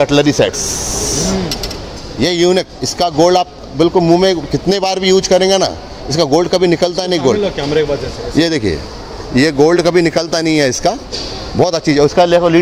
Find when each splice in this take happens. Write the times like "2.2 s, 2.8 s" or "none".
none